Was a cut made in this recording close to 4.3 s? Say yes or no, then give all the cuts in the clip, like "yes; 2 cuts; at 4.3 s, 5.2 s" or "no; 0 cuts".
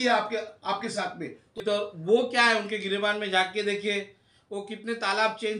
no; 1 cut; at 1.6 s